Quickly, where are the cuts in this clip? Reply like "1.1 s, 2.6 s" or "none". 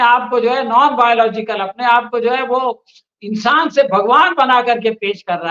none